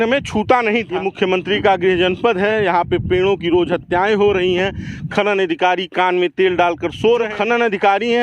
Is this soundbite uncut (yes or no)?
no